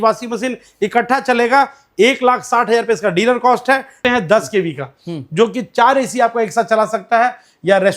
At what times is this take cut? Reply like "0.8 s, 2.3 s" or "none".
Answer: 4.0 s